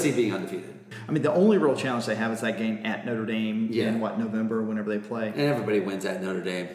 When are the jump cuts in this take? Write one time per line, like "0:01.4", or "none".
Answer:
0:00.9